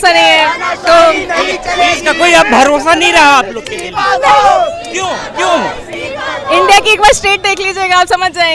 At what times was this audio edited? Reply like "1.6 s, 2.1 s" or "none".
none